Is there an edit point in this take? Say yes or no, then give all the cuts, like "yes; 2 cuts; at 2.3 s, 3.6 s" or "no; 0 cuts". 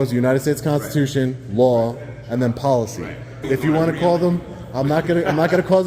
yes; 1 cut; at 3.4 s